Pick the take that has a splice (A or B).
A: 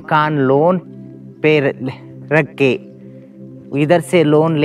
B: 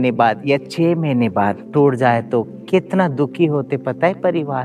B